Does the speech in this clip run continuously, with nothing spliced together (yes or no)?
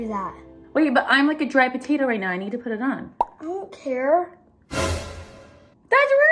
yes